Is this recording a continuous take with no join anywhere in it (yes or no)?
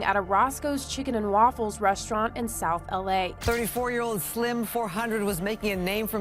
no